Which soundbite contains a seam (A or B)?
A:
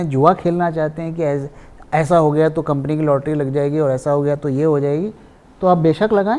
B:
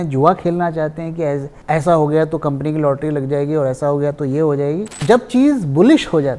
B